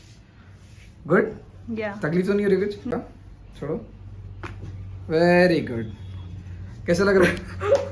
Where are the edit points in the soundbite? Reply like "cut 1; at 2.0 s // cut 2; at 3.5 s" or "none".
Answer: cut 1; at 2.9 s